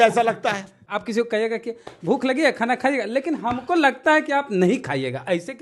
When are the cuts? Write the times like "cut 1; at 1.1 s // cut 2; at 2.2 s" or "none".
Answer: cut 1; at 1.1 s

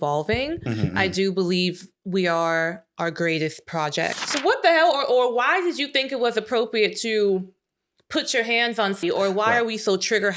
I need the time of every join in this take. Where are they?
cut 1; at 4.3 s // cut 2; at 9.0 s

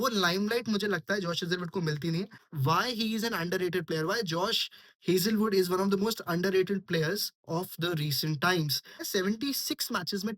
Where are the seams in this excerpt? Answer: cut 1; at 2.4 s // cut 2; at 9.0 s

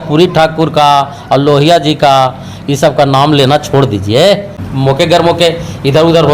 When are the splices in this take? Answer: cut 1; at 4.6 s

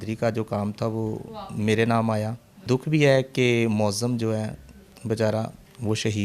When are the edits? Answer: cut 1; at 2.7 s

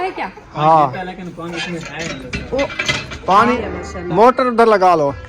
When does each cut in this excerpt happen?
cut 1; at 3.6 s

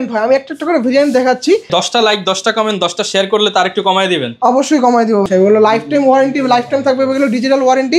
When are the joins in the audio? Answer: cut 1; at 1.7 s // cut 2; at 5.3 s

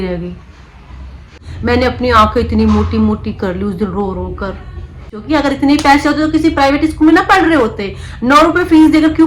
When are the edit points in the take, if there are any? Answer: cut 1; at 1.2 s // cut 2; at 5.1 s

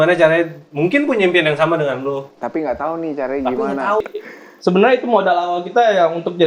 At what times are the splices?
cut 1; at 4.0 s

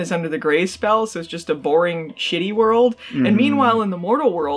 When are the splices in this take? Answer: none

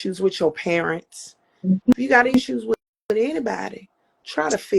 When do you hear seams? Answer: none

